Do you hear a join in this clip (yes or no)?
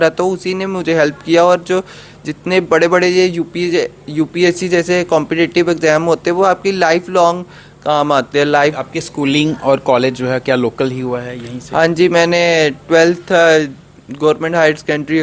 yes